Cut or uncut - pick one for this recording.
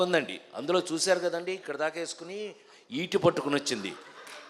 uncut